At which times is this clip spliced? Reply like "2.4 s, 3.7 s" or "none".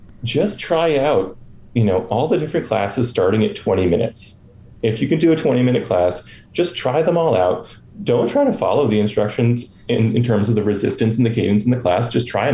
none